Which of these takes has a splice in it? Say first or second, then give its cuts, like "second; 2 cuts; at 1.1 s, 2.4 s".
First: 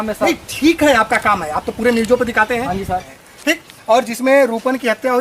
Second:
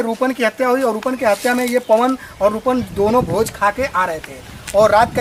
first; 1 cut; at 3.1 s